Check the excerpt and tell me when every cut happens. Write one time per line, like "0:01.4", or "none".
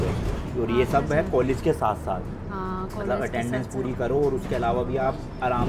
none